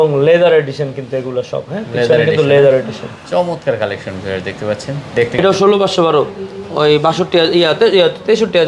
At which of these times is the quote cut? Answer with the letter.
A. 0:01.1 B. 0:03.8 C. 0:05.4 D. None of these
C